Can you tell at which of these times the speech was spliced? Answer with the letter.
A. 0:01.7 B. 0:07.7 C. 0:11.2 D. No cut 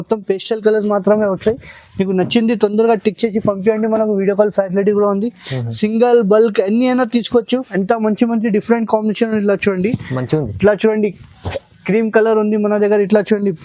B